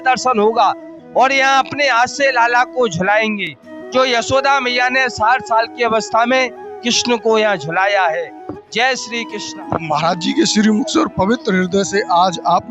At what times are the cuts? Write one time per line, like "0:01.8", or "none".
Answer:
none